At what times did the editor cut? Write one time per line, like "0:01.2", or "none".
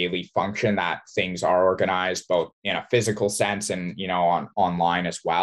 0:04.5